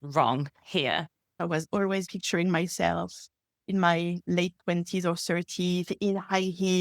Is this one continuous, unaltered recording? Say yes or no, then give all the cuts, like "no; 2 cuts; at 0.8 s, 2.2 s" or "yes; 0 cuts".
no; 1 cut; at 1.4 s